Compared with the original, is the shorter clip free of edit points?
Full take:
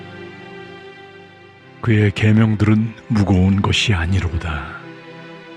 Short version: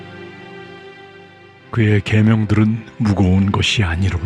no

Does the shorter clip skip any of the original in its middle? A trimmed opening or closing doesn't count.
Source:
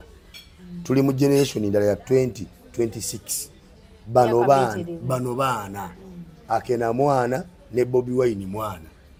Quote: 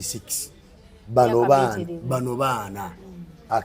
no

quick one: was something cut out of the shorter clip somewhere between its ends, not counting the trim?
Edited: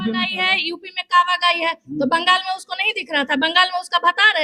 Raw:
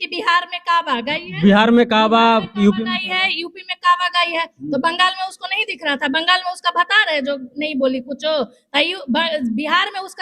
no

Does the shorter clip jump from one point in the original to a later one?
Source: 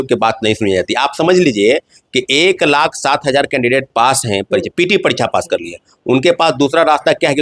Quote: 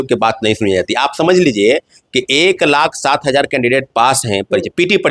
no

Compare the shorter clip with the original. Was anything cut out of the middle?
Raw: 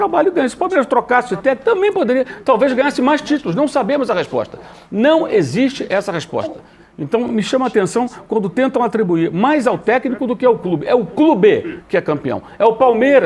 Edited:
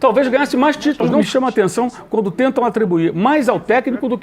yes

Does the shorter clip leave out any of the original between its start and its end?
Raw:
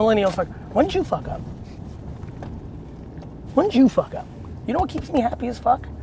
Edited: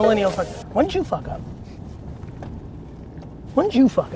no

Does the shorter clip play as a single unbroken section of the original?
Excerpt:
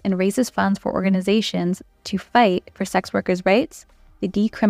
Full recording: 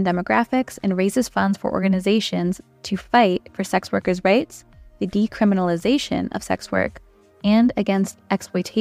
yes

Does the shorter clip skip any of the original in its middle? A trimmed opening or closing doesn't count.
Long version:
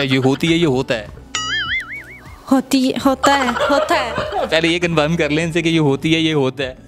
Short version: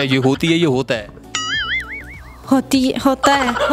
no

